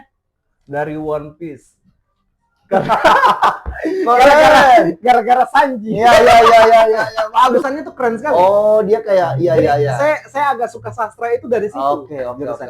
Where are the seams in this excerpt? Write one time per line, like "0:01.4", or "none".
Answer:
0:07.6